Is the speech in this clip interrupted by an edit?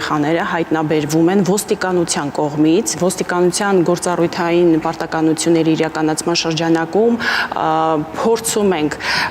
no; 0 cuts

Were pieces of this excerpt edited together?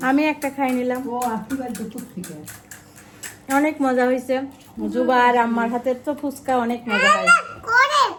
no; 0 cuts

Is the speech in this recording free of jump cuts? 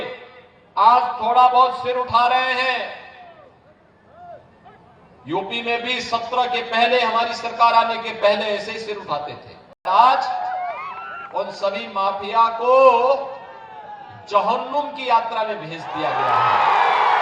no; 1 cut; at 9.8 s

